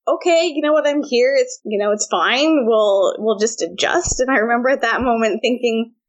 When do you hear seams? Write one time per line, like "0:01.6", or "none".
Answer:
0:01.6